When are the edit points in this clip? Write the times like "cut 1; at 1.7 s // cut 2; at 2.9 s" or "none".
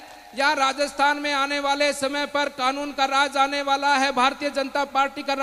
none